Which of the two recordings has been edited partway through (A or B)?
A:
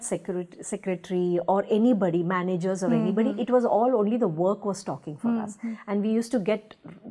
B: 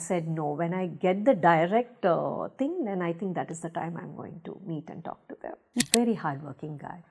B